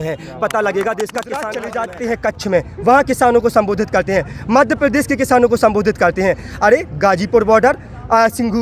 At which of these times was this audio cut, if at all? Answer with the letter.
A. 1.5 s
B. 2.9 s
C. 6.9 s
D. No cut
A